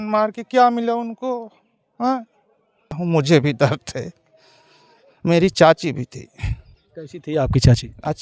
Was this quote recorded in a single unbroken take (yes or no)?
no